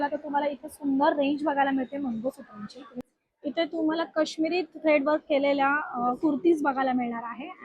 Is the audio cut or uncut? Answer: cut